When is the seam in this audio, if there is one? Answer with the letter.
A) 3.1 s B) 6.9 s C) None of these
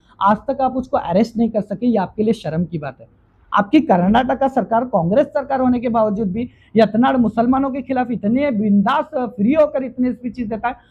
C